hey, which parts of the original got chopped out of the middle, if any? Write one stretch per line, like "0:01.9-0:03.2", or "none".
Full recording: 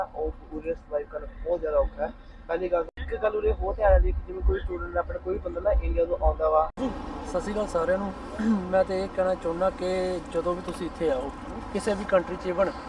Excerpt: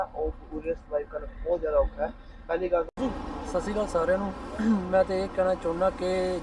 0:02.9-0:06.7